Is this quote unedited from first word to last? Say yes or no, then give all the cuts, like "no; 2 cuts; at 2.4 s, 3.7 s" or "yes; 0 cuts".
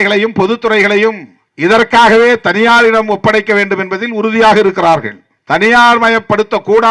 yes; 0 cuts